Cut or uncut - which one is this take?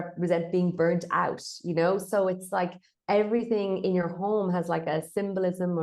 uncut